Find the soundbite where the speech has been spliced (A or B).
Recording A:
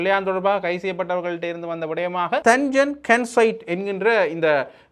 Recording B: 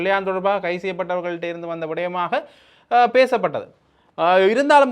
A